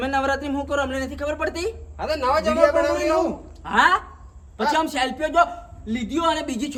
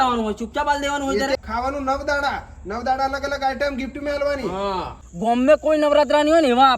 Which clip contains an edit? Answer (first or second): second